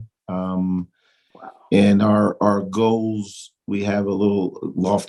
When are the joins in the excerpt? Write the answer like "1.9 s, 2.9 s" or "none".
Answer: none